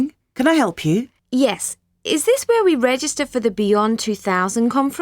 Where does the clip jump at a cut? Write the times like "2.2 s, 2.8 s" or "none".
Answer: 1.2 s